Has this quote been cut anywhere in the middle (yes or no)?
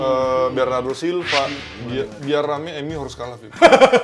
yes